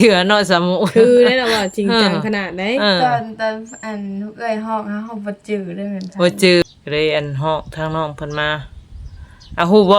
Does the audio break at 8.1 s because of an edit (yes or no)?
no